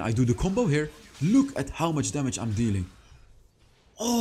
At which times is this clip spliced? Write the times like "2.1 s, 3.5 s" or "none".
none